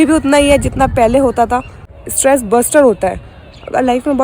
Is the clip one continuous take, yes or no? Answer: no